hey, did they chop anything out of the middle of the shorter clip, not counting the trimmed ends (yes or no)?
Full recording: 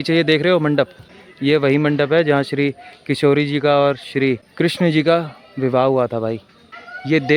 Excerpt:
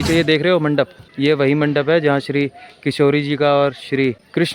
yes